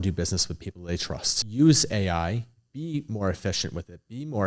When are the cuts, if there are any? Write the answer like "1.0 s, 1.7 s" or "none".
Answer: 1.4 s